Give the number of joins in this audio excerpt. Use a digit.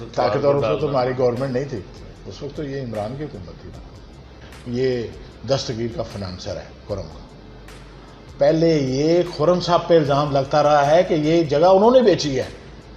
1